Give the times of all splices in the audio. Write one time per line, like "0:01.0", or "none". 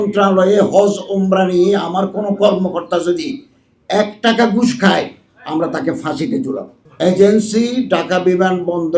0:06.8